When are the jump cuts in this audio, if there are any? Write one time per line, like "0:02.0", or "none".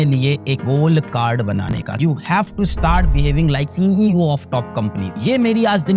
0:02.0